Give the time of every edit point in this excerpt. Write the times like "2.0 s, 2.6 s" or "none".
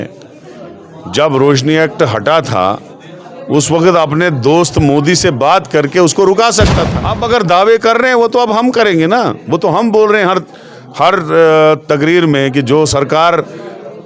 6.7 s